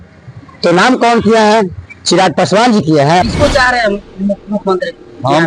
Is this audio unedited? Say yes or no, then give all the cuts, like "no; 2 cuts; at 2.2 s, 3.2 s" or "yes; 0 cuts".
no; 1 cut; at 3.3 s